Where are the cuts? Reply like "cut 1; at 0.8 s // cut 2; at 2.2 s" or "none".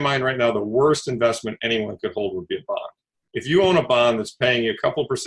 cut 1; at 3.2 s